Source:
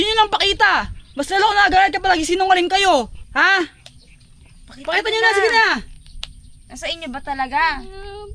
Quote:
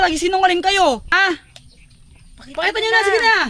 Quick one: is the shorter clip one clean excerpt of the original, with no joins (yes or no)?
no